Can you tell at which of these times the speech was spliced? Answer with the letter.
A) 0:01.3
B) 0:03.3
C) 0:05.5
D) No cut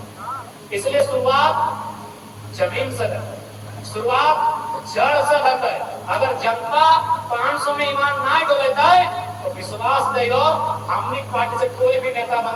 D